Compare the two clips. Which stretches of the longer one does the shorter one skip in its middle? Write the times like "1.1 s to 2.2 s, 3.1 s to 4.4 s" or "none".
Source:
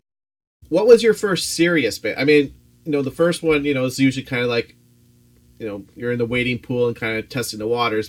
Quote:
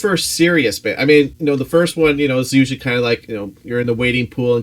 2.5 s to 2.8 s, 4.7 s to 5.6 s

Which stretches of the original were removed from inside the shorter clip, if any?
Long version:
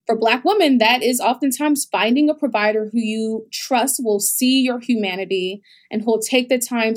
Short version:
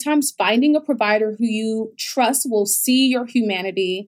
none

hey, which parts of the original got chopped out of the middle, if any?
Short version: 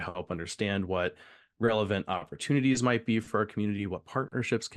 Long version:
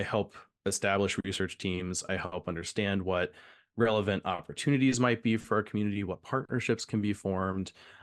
none

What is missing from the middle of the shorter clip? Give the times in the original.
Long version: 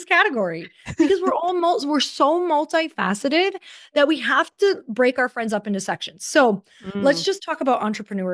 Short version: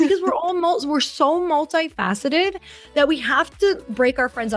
none

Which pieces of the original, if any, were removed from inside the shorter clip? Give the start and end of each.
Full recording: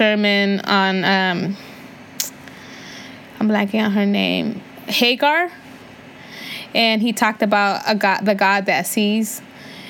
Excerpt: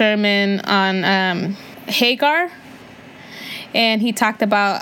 1.8 s to 4.8 s

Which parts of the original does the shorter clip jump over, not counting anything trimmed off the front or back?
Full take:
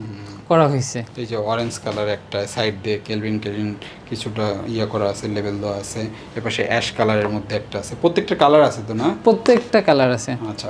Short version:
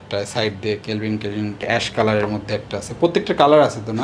3.9 s to 6.7 s

